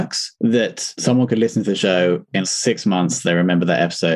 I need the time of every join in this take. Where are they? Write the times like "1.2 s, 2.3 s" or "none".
none